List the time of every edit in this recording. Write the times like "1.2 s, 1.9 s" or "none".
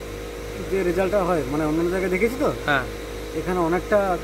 none